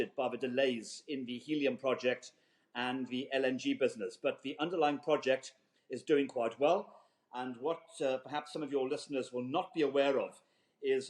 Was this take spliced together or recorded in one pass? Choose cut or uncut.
uncut